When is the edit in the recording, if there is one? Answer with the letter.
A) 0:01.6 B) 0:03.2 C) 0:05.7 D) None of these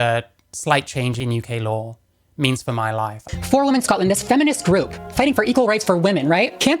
B